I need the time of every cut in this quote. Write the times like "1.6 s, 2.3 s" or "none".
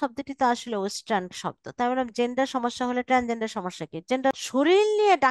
4.3 s